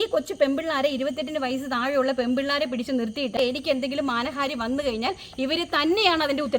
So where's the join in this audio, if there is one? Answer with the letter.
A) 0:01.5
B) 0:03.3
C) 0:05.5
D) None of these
B